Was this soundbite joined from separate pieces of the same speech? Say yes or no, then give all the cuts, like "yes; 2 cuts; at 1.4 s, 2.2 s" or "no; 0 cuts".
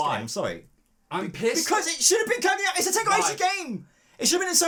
no; 0 cuts